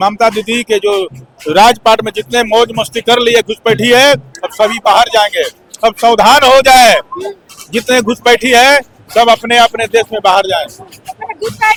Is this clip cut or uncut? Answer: uncut